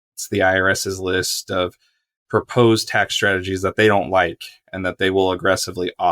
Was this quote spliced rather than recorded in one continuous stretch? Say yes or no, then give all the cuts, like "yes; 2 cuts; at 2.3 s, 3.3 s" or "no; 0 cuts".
yes; 1 cut; at 2.2 s